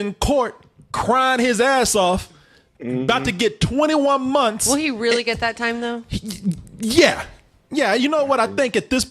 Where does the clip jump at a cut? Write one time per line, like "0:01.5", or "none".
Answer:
none